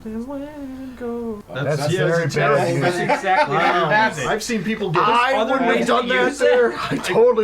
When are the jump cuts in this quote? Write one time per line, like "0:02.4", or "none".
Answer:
0:01.4

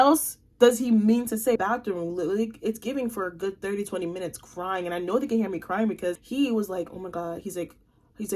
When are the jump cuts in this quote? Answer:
0:01.6
0:06.2

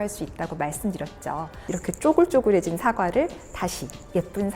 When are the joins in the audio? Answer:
0:01.6

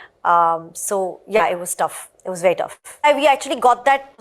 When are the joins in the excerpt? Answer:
0:03.0

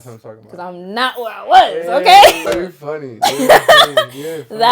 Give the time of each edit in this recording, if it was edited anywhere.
0:02.4

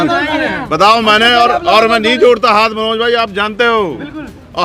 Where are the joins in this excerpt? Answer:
none

